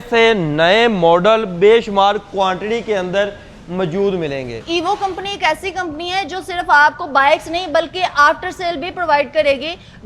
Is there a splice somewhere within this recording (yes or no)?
yes